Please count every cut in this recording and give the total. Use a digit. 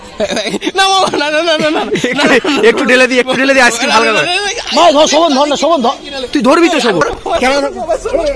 1